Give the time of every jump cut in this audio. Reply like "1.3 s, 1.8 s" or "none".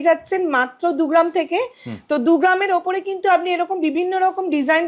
none